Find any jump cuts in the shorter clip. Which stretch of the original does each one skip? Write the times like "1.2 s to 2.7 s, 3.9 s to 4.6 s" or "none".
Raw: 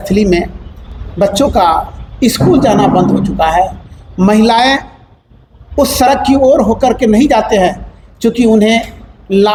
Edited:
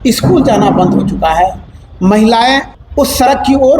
4.9 s to 5.6 s